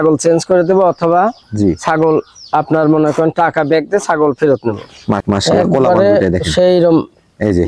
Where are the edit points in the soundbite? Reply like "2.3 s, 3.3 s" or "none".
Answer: 5.2 s